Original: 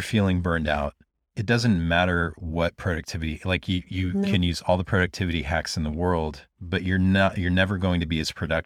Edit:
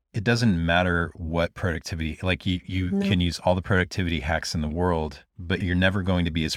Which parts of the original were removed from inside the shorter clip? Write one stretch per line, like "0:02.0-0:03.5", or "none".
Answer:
0:06.8-0:07.3